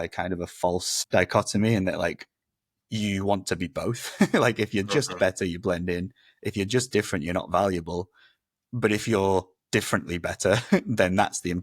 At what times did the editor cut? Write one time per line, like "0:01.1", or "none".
0:01.0